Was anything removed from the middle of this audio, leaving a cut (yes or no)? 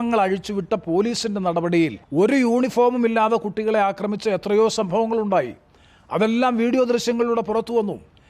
yes